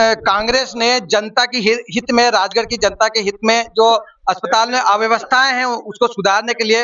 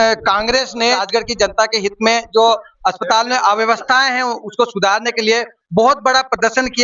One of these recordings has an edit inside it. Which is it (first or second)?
second